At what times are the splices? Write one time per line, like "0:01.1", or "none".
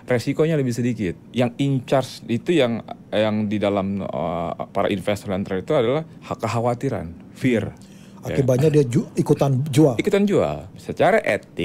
0:01.2
0:06.2
0:10.7